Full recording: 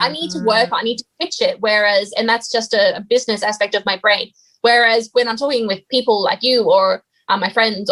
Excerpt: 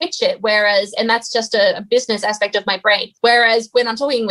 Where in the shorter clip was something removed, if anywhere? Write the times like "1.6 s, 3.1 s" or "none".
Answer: 3.1 s